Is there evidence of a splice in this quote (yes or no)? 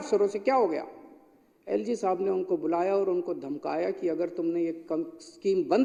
no